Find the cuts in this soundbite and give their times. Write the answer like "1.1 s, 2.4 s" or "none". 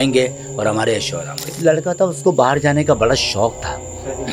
1.6 s